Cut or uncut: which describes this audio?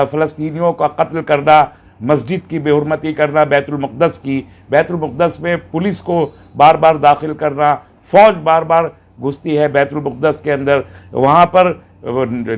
uncut